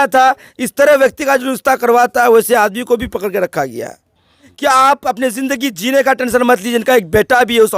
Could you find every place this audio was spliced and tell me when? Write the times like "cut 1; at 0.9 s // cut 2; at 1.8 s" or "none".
cut 1; at 4.4 s